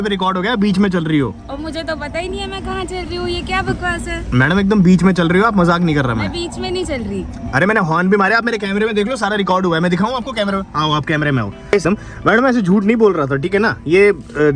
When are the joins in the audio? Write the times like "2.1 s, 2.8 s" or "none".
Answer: 11.8 s